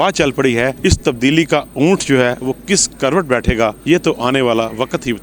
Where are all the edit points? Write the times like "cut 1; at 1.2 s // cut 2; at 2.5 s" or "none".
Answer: cut 1; at 0.8 s // cut 2; at 3.8 s

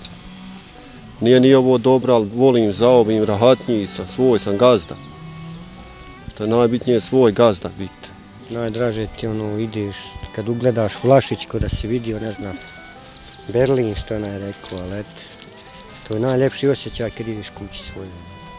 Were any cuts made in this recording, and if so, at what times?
cut 1; at 8.4 s

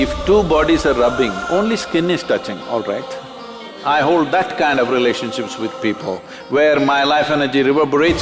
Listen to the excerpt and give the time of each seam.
cut 1; at 3.7 s

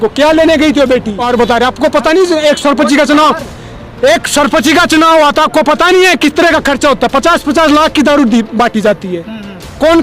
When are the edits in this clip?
cut 1; at 1.2 s

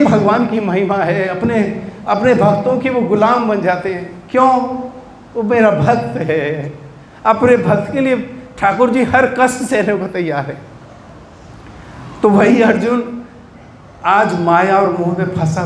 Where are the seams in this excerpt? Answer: cut 1; at 11.1 s

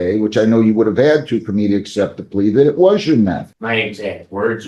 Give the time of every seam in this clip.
cut 1; at 3.5 s

